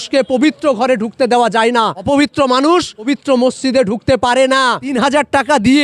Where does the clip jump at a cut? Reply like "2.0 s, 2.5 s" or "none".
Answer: 2.0 s, 3.1 s, 5.0 s